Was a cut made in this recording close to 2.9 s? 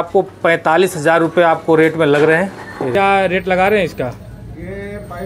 yes; 1 cut; at 2.9 s

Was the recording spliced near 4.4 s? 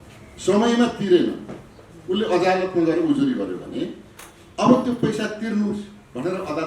no; 0 cuts

